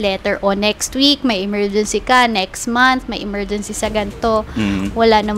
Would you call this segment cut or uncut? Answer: uncut